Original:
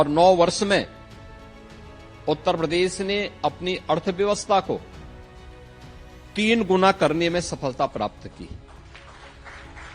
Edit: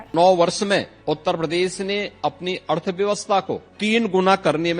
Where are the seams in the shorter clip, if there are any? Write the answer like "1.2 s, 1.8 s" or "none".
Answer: 0.9 s, 3.7 s